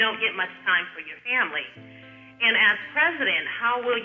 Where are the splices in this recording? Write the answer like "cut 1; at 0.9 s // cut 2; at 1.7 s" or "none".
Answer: none